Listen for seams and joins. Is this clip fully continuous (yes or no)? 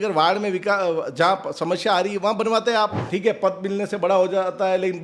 no